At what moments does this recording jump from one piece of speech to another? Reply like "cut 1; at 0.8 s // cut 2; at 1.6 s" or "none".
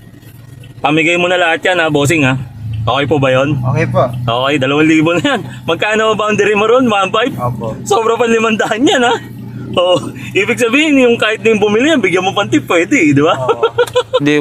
none